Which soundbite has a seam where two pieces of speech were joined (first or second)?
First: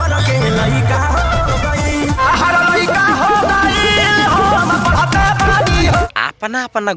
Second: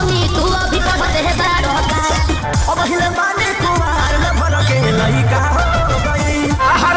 first